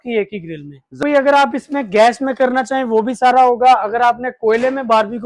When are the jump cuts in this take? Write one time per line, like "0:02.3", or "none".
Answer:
0:01.0